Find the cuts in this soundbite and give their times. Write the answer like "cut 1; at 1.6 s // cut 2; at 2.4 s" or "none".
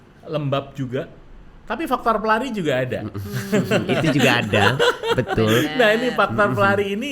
none